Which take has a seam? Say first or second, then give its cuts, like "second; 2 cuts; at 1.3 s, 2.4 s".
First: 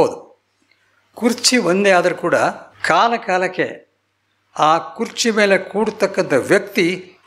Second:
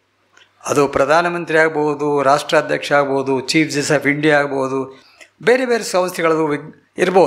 first; 1 cut; at 2.7 s